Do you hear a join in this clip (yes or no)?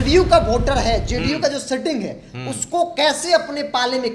no